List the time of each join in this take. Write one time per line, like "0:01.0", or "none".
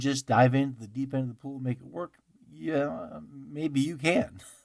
none